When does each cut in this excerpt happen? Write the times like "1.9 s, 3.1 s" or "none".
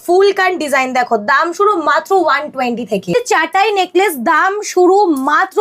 3.1 s